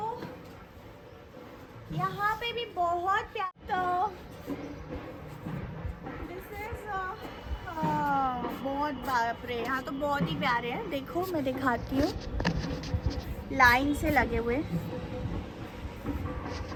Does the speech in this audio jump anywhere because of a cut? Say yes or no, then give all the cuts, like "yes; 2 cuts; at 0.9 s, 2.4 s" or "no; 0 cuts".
no; 0 cuts